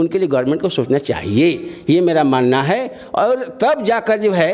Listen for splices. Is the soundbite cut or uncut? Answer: uncut